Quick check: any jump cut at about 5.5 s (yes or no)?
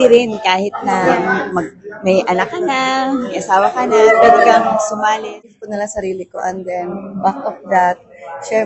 yes